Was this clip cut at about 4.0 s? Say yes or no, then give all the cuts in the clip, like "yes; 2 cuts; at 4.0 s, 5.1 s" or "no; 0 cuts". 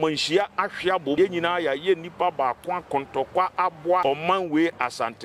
yes; 2 cuts; at 1.2 s, 4.0 s